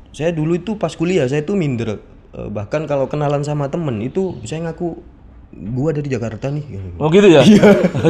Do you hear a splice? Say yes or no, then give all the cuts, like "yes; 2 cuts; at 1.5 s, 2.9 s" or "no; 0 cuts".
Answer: no; 0 cuts